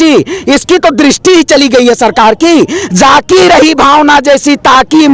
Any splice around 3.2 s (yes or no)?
no